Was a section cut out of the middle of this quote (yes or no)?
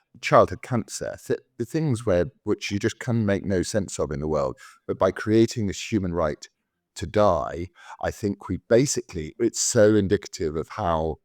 no